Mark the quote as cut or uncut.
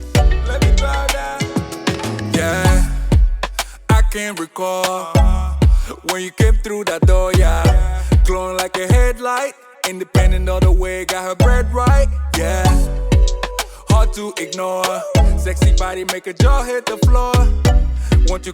cut